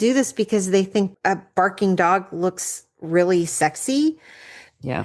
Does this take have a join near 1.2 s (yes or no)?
yes